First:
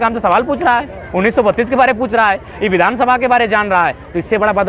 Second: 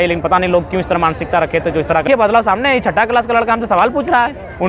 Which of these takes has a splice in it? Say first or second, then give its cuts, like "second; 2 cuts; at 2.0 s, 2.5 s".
second; 1 cut; at 2.0 s